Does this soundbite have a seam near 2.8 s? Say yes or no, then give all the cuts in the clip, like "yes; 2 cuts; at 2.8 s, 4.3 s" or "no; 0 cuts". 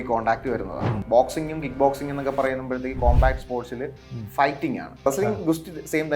no; 2 cuts; at 1.0 s, 5.0 s